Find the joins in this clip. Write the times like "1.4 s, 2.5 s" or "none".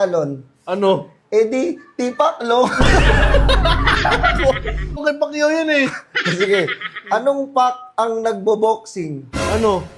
5.0 s